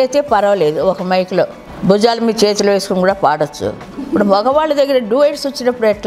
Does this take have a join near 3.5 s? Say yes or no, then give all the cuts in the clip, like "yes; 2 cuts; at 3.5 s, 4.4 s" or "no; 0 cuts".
no; 1 cut; at 1.5 s